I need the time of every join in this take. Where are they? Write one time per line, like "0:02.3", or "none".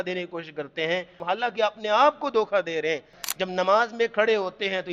0:01.2
0:03.3